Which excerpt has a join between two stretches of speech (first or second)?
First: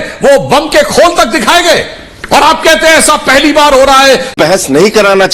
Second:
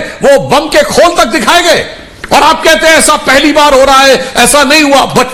first